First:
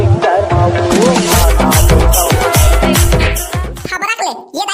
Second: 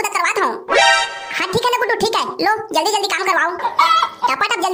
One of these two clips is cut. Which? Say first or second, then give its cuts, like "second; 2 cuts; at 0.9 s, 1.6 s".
first; 1 cut; at 2.4 s